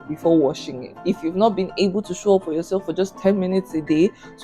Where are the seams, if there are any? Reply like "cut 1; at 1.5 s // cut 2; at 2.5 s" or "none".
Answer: cut 1; at 1.0 s